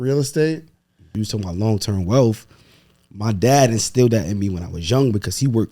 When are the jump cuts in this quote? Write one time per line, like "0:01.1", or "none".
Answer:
0:01.0